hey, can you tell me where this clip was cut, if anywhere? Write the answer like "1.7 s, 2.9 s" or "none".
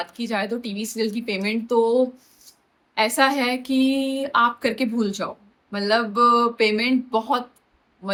none